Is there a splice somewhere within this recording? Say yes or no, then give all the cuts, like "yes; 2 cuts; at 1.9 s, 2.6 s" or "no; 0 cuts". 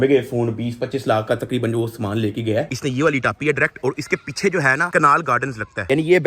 yes; 1 cut; at 2.7 s